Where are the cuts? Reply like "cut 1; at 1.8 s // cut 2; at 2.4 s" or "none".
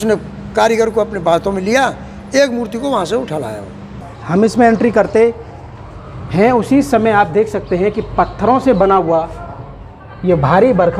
cut 1; at 4.1 s